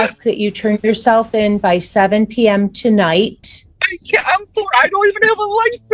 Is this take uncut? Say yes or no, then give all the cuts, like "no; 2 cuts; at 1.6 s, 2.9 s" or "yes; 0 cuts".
yes; 0 cuts